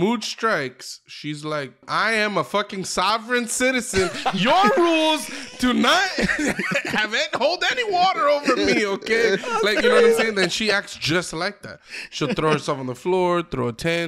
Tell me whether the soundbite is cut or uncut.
cut